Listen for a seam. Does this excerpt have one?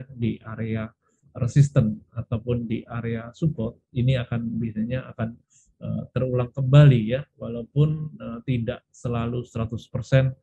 no; 0 cuts

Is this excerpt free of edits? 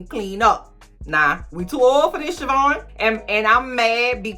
no; 2 cuts; at 1.5 s, 2.9 s

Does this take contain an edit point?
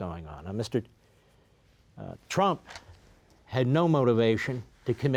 no; 0 cuts

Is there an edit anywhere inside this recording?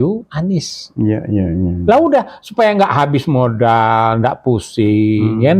no; 0 cuts

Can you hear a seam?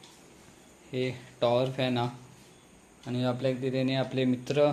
no; 0 cuts

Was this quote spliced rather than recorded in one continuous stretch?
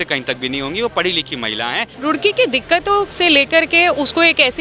yes; 1 cut; at 1.9 s

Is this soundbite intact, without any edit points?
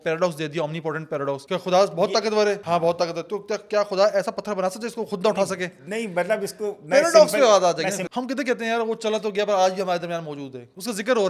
no; 3 cuts; at 1.4 s, 2.6 s, 8.0 s

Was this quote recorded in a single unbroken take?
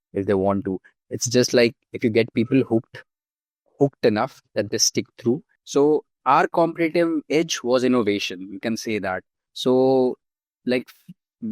no; 1 cut; at 5.5 s

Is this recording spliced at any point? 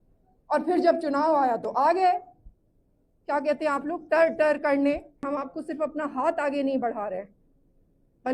yes; 1 cut; at 5.2 s

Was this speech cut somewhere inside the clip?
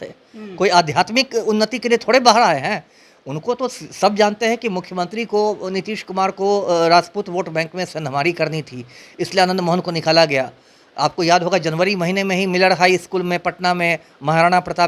no; 0 cuts

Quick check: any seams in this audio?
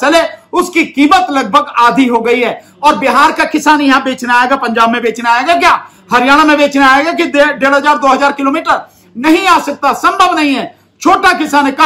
no; 0 cuts

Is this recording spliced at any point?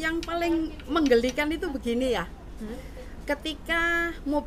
no; 0 cuts

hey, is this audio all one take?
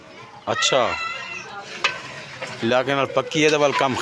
no; 1 cut; at 1.8 s

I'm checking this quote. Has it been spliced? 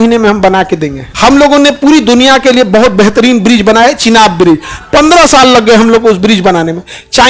yes; 1 cut; at 1.1 s

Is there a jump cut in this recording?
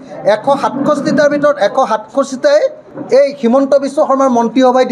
yes; 1 cut; at 2.9 s

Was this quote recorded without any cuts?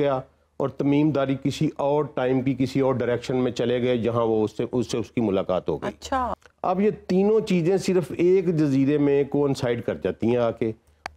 no; 1 cut; at 6.5 s

